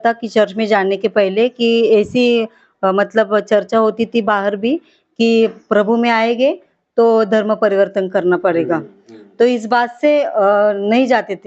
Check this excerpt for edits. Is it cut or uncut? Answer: uncut